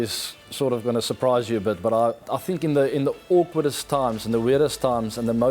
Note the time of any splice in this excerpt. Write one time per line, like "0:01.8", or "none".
0:02.2